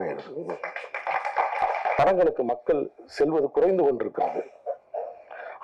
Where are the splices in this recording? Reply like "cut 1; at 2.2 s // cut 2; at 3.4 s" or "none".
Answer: cut 1; at 2.0 s